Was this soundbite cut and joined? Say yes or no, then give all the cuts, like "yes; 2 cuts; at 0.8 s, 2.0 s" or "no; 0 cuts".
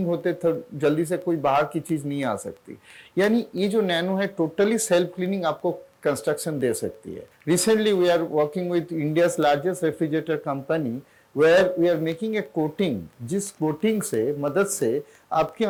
no; 0 cuts